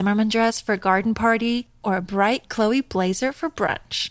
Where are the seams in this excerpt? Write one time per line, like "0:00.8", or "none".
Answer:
none